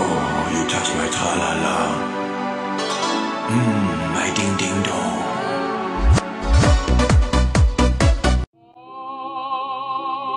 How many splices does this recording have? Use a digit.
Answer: 0